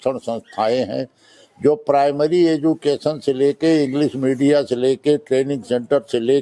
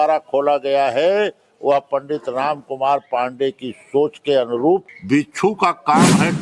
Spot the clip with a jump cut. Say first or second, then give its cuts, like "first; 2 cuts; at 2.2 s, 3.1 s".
second; 1 cut; at 4.9 s